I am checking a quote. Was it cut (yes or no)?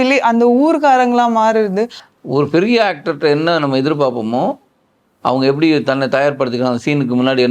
yes